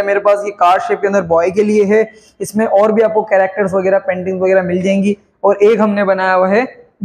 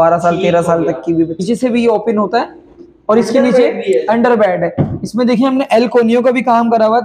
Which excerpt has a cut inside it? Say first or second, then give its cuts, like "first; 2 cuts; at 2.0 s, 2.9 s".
second; 1 cut; at 1.4 s